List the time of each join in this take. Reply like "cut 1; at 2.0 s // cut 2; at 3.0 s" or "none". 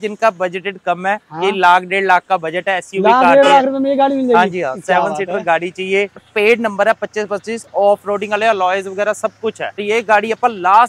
cut 1; at 6.2 s // cut 2; at 9.8 s